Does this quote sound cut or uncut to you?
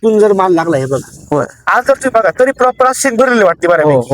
cut